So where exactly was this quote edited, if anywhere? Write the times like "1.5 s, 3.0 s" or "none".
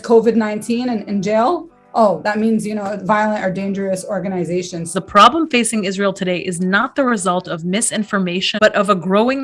4.9 s, 8.5 s